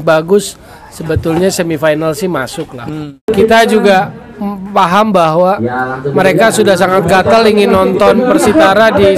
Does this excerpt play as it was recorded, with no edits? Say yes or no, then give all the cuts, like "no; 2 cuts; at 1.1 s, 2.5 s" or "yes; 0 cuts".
no; 1 cut; at 3.3 s